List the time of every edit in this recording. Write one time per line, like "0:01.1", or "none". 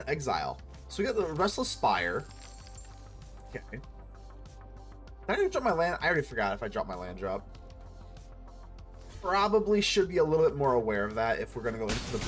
none